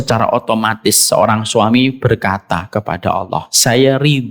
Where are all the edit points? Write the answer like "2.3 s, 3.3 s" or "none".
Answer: none